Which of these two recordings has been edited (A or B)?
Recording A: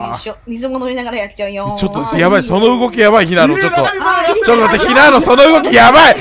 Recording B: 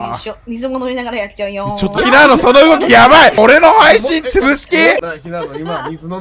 B